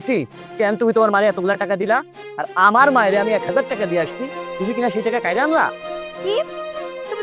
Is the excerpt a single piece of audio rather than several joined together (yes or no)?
yes